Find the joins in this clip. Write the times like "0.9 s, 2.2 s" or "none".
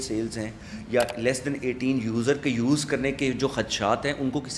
none